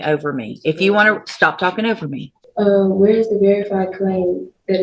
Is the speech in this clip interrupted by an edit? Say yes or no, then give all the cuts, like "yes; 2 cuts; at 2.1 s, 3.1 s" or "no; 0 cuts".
yes; 1 cut; at 2.3 s